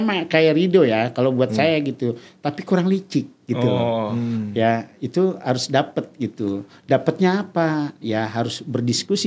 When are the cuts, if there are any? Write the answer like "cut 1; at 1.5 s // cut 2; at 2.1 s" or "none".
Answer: none